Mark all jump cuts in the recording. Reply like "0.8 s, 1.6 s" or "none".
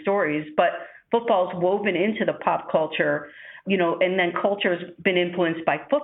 none